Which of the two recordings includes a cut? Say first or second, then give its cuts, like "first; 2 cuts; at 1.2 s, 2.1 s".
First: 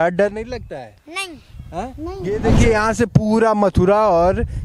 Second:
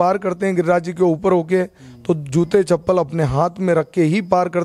first; 1 cut; at 2.3 s